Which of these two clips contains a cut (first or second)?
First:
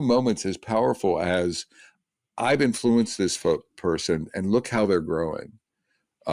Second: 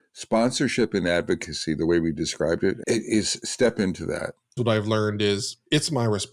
second